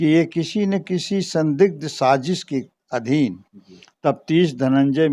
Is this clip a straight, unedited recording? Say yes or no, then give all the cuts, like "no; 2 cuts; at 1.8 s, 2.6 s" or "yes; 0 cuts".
yes; 0 cuts